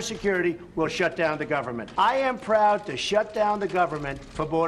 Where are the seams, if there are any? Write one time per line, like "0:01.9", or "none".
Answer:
0:01.8

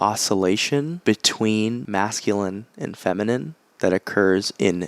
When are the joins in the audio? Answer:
0:00.9
0:01.8

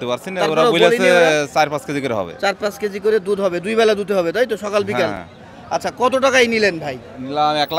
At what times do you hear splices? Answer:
none

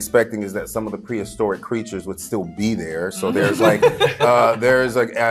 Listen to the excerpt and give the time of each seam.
none

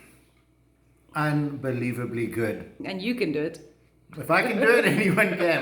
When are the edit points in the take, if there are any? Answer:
0:02.9

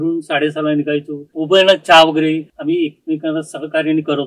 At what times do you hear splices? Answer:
0:01.3
0:02.5

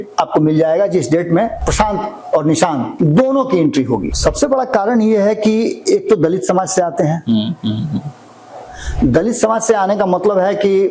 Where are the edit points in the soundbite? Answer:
0:01.6
0:02.9
0:04.1

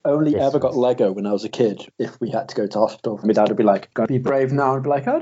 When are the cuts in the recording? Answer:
0:01.9
0:03.2
0:03.9

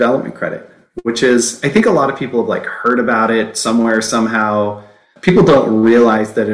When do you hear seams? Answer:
0:05.1

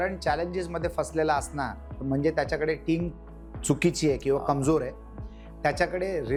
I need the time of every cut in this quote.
none

